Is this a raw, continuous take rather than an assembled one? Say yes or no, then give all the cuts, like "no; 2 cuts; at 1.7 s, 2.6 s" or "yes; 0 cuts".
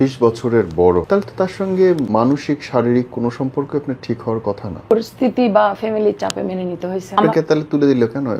no; 4 cuts; at 1.1 s, 2.0 s, 4.9 s, 7.2 s